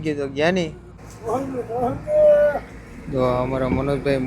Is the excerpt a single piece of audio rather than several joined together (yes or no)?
no